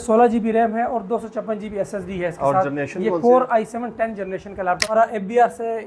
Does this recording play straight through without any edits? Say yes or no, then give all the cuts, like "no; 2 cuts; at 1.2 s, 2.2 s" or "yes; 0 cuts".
no; 1 cut; at 4.8 s